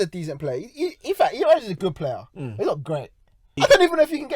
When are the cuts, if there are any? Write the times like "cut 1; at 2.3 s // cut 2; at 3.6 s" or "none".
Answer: cut 1; at 3.4 s